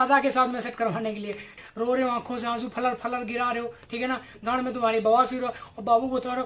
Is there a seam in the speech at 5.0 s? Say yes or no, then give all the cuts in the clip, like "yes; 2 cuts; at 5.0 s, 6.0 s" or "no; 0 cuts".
no; 1 cut; at 1.6 s